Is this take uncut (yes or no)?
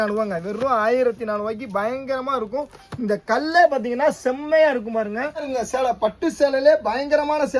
no